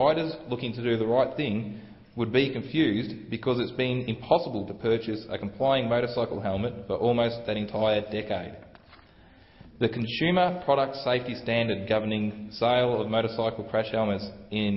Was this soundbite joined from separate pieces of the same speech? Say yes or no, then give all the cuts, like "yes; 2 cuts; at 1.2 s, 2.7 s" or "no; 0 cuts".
yes; 1 cut; at 13.6 s